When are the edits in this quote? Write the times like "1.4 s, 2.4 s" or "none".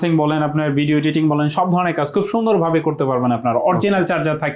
none